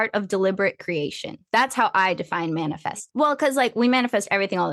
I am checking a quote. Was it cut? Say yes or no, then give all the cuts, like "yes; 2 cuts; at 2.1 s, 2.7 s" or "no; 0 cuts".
yes; 1 cut; at 3.0 s